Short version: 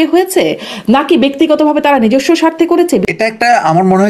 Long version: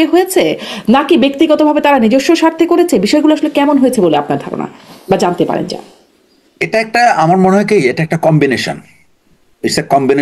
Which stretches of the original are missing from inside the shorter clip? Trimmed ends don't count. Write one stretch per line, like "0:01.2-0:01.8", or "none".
0:03.1-0:06.6